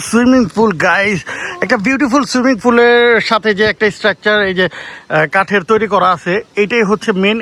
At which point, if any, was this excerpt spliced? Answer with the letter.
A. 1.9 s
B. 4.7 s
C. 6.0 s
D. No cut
D